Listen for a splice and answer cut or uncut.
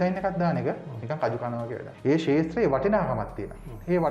cut